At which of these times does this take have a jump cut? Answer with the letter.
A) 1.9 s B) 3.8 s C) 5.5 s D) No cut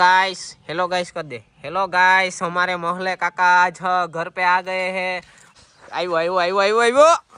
C